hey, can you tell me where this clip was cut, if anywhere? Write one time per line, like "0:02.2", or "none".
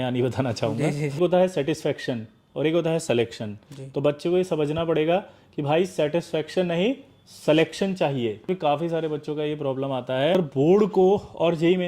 0:01.2
0:08.5
0:10.3